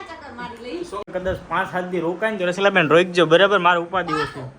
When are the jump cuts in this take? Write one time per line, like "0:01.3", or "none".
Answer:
0:01.1